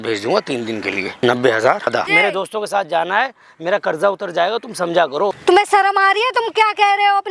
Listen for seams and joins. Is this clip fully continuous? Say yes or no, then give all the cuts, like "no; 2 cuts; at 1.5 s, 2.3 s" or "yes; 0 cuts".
no; 3 cuts; at 1.1 s, 2.0 s, 5.3 s